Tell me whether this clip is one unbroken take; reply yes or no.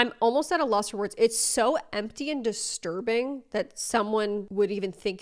yes